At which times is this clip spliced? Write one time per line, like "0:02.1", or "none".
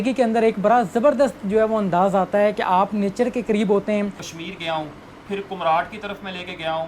0:04.2